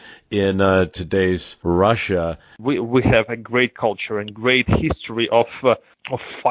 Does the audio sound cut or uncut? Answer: cut